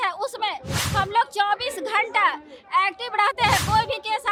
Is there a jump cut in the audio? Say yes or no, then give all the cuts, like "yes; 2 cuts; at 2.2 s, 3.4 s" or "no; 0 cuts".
no; 0 cuts